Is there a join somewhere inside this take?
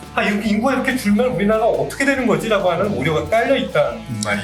no; 0 cuts

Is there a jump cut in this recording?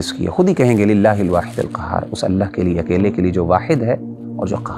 no; 0 cuts

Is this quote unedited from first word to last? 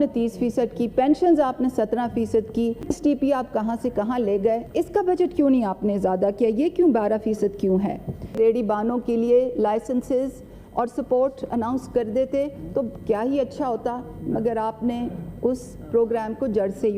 no; 3 cuts; at 2.9 s, 4.7 s, 8.4 s

